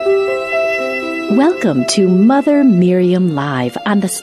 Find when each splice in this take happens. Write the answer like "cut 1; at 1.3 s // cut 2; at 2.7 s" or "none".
cut 1; at 1.2 s

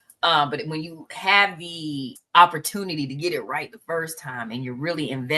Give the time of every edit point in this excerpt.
cut 1; at 2.1 s

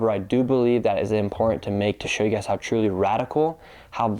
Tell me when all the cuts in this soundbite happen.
none

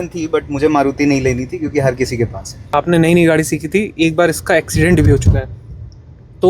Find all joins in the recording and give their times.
cut 1; at 2.7 s

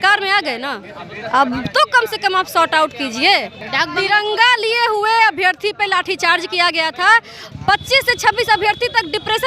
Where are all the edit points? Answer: cut 1; at 3.6 s // cut 2; at 7.4 s

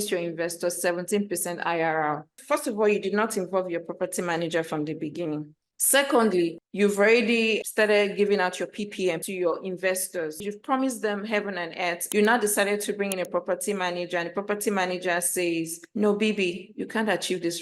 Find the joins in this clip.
cut 1; at 10.4 s // cut 2; at 12.1 s

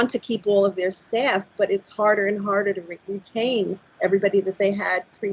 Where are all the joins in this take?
none

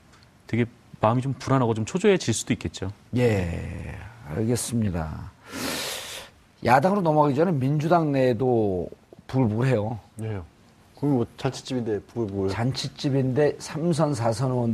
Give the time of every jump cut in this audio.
cut 1; at 11.2 s

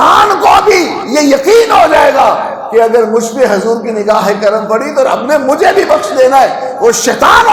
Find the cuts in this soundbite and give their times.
none

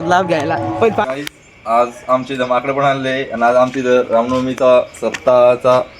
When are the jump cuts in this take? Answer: cut 1; at 1.0 s

